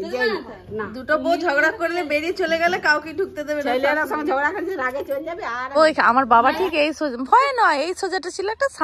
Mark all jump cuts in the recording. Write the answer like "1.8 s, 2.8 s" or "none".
5.7 s